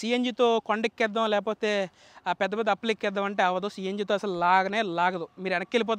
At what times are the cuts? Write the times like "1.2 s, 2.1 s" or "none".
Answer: none